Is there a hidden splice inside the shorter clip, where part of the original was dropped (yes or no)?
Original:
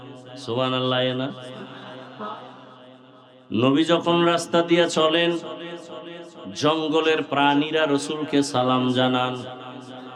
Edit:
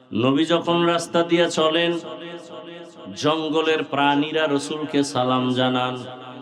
no